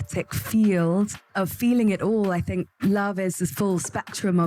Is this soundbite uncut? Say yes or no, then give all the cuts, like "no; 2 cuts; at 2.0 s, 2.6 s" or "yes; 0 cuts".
no; 2 cuts; at 1.2 s, 2.7 s